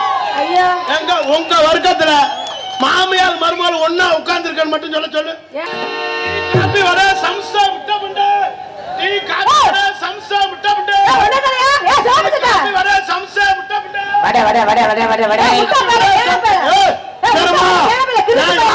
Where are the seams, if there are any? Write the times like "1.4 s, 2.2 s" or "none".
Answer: 5.6 s

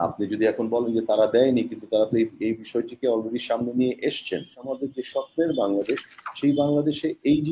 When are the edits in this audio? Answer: 4.6 s

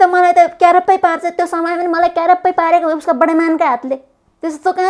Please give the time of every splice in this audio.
none

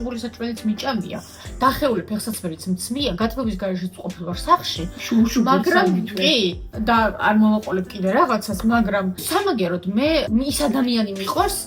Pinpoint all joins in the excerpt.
none

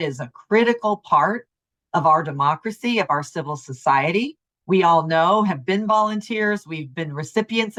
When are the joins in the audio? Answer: none

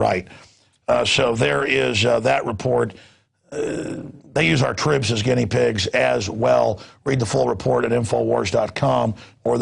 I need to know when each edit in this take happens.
2.0 s

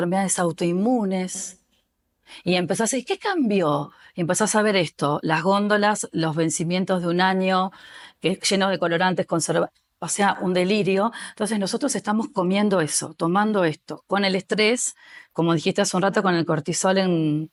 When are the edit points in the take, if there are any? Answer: none

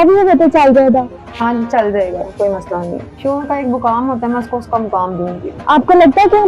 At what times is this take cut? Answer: 3.2 s, 5.5 s

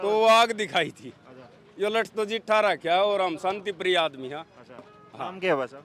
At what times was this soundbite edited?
none

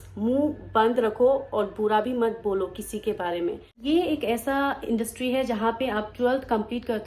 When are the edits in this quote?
3.8 s

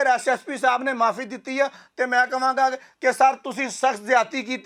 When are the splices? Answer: none

